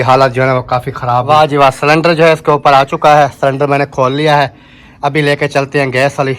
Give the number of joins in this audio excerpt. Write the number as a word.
one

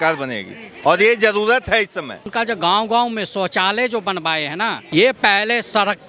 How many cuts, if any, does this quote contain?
two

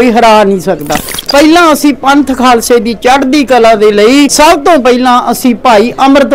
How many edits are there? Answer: two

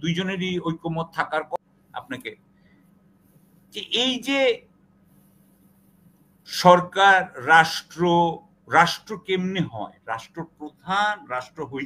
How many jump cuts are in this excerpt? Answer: one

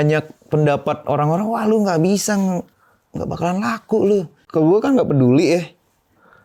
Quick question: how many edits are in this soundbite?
one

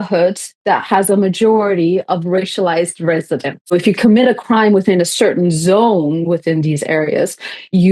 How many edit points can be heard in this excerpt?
one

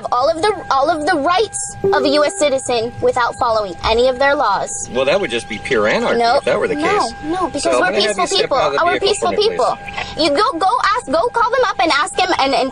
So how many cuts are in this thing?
one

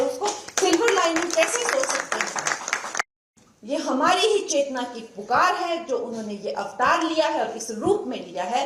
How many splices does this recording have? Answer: one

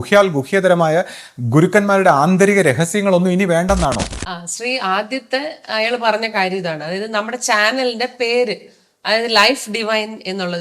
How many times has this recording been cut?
one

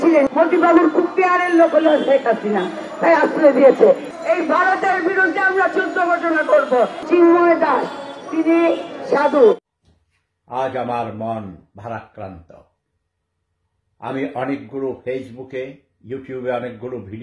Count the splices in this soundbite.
one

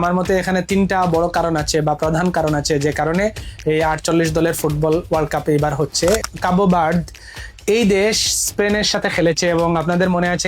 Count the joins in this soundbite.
one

